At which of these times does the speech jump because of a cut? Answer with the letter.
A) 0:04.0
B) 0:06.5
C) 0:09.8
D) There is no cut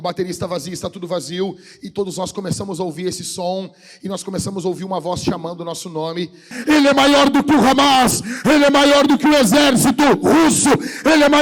B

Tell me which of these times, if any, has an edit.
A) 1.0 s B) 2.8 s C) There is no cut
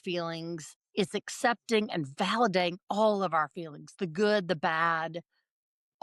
B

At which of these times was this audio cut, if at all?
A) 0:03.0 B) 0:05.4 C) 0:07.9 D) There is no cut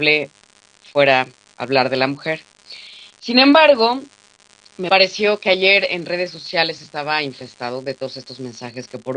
B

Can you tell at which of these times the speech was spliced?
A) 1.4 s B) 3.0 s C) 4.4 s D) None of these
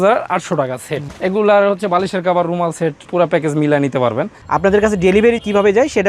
C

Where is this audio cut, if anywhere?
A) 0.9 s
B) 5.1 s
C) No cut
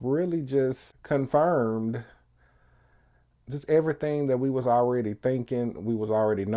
A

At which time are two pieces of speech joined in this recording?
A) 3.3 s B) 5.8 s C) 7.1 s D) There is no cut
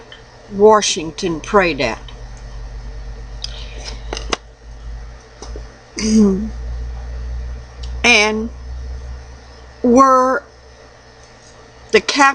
C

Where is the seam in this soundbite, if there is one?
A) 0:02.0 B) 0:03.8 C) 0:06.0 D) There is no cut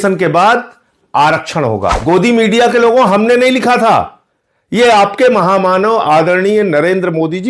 A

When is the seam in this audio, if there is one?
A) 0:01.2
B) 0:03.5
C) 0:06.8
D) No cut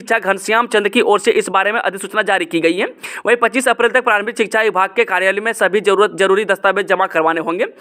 D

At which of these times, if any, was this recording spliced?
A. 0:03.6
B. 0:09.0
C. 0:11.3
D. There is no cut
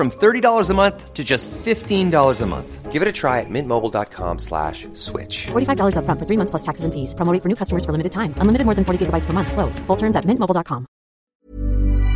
C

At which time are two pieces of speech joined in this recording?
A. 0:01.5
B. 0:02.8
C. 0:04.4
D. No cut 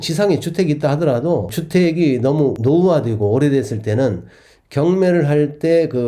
A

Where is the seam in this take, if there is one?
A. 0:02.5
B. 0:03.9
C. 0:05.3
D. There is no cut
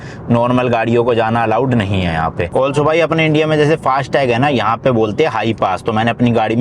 A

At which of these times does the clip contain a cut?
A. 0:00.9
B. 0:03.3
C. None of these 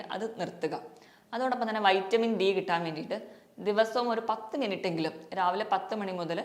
C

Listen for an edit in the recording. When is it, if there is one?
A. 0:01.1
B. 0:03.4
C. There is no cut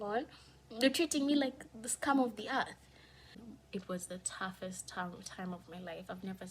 B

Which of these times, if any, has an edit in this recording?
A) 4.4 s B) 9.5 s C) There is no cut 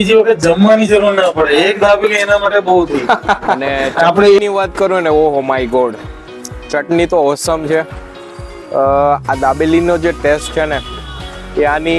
A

